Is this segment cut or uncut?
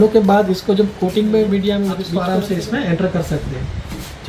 cut